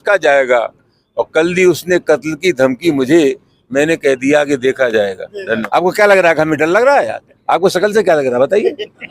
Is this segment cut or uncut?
cut